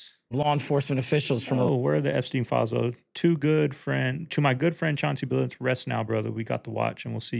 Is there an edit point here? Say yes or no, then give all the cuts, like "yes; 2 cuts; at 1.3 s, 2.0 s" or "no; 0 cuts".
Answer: no; 0 cuts